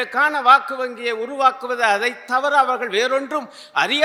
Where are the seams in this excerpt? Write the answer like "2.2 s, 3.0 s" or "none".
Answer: none